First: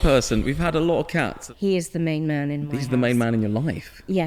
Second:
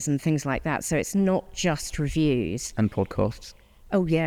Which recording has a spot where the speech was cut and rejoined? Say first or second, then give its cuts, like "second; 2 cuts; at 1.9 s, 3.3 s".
first; 1 cut; at 1.4 s